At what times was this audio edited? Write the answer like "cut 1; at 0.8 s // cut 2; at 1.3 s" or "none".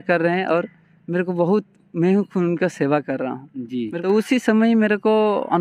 cut 1; at 3.9 s